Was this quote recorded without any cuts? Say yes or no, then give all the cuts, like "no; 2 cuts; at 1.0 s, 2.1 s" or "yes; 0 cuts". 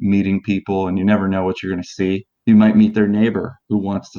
no; 1 cut; at 2.3 s